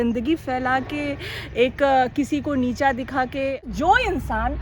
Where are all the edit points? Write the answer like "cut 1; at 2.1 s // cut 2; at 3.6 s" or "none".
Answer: cut 1; at 3.6 s